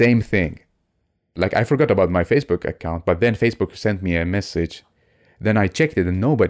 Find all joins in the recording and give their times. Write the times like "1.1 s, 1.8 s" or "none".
1.4 s